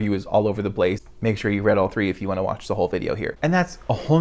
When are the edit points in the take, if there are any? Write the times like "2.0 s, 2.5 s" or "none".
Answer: 1.0 s, 3.3 s